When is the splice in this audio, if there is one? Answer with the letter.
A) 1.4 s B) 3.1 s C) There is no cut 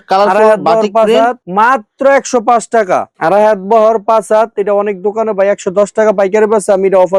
C